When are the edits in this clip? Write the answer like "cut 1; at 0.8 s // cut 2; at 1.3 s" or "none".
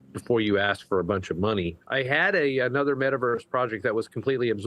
cut 1; at 1.8 s